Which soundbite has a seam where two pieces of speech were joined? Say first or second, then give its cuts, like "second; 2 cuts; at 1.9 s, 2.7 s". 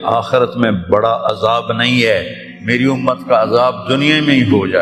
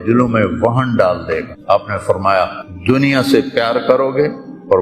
second; 2 cuts; at 1.5 s, 2.6 s